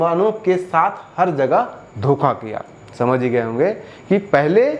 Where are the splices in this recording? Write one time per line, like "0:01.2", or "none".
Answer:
none